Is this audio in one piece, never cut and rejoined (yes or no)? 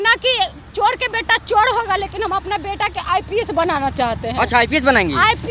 yes